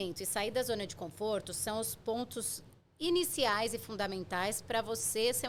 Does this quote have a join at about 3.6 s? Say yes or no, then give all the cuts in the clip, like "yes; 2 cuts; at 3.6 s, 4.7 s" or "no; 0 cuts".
no; 0 cuts